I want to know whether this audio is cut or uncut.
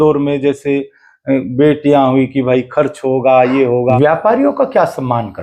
cut